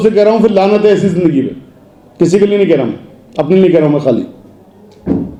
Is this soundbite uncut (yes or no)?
yes